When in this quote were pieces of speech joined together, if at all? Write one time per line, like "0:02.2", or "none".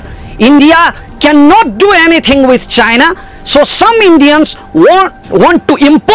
none